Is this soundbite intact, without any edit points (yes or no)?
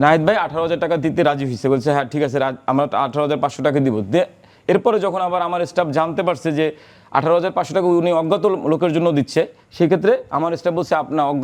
yes